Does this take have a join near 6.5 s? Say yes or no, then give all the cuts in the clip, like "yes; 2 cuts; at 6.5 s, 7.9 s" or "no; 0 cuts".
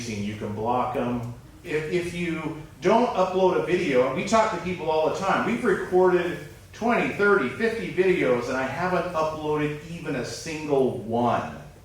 no; 1 cut; at 1.5 s